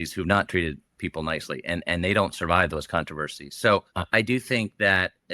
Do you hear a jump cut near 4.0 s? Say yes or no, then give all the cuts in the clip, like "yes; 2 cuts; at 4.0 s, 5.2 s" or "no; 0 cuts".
yes; 1 cut; at 4.0 s